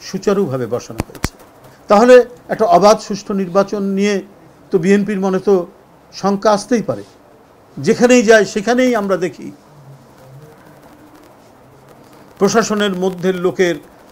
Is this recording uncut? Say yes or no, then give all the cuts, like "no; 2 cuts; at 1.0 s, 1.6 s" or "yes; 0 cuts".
yes; 0 cuts